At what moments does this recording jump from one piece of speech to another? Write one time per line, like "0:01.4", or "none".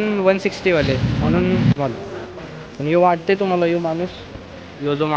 0:01.7